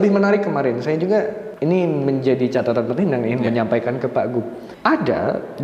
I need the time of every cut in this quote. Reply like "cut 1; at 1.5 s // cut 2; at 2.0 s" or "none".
cut 1; at 1.4 s // cut 2; at 4.6 s